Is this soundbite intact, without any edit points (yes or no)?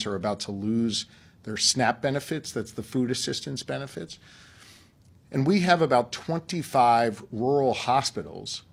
yes